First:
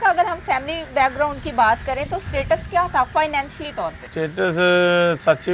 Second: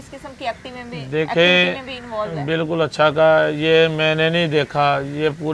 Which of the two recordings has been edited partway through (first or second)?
first